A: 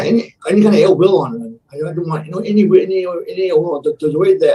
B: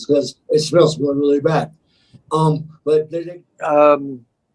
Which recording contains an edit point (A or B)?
B